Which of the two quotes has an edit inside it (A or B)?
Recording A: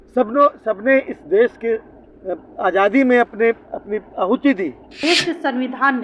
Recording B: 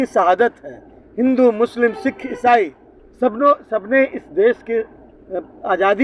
A